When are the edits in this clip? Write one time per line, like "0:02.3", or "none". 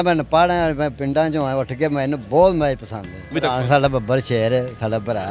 0:03.3